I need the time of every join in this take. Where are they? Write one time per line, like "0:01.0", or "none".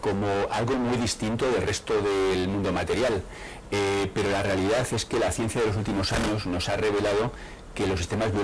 0:02.6